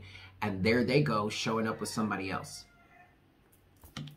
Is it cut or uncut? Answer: uncut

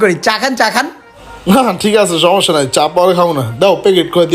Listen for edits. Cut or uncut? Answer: uncut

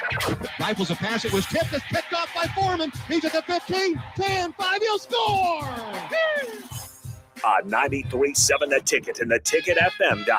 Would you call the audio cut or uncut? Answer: uncut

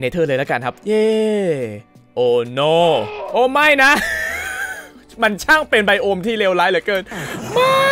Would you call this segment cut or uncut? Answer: uncut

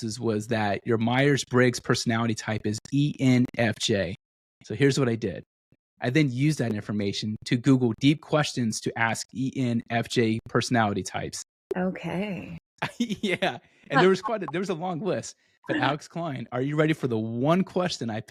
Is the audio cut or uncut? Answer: uncut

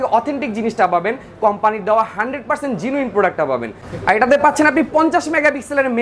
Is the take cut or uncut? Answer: cut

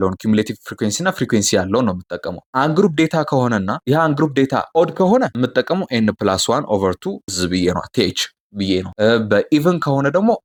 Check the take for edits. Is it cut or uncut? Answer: uncut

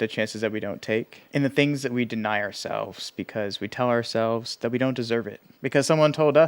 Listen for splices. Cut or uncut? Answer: cut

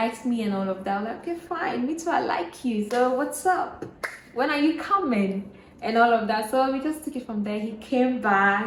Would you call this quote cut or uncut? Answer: uncut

